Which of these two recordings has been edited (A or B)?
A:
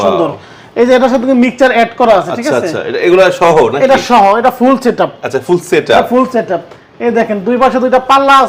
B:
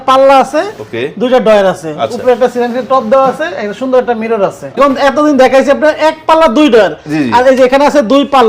B